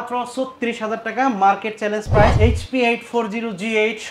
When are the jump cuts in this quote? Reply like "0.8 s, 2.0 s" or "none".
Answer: 2.3 s